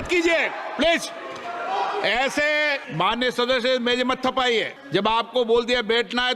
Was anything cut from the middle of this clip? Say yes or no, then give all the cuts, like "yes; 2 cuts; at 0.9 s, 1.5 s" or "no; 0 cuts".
yes; 2 cuts; at 2.8 s, 4.8 s